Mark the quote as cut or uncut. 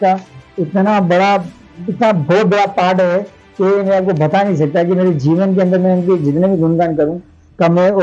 uncut